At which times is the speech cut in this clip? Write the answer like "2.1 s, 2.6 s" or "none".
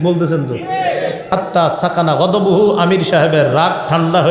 1.3 s

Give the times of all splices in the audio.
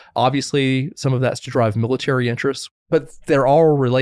2.6 s

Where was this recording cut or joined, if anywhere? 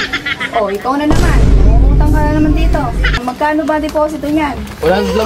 3.2 s

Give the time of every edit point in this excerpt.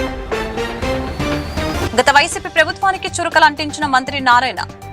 1.7 s

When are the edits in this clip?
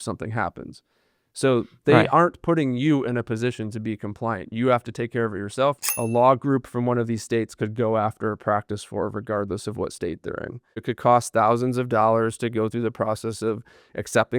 5.9 s, 10.8 s

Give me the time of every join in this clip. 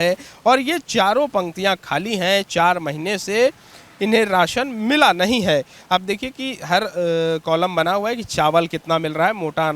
none

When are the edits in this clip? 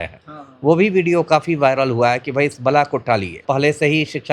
3.4 s

